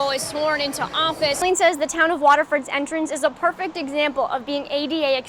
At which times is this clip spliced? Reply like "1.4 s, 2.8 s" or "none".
1.4 s